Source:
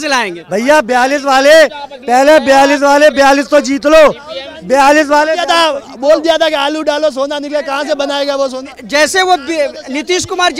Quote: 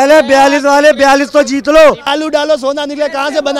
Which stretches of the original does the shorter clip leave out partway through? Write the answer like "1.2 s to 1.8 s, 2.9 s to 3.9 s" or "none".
4.2 s to 6.6 s